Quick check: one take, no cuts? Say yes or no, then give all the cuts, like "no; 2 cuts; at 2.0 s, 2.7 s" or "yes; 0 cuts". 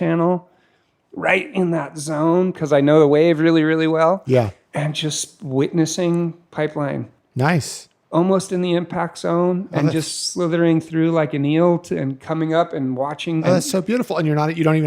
no; 1 cut; at 13.4 s